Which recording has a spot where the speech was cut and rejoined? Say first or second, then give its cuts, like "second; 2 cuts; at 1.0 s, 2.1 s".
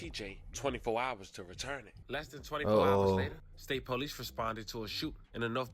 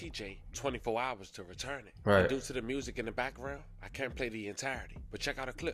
first; 2 cuts; at 2.0 s, 3.5 s